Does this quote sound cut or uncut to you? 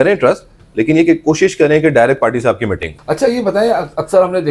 cut